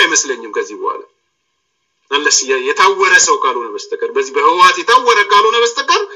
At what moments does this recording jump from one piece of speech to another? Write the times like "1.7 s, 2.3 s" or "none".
none